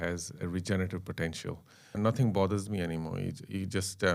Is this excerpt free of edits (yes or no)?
no